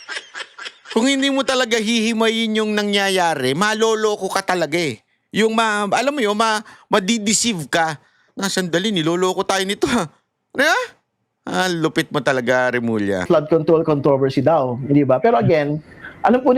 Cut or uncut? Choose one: cut